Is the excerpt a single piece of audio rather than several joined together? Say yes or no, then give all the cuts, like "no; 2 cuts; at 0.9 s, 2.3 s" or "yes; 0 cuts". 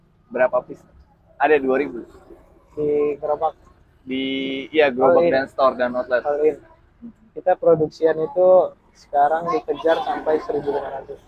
yes; 0 cuts